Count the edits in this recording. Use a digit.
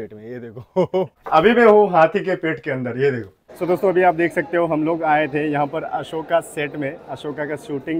2